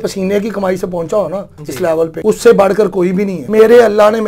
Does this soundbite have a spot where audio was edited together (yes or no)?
yes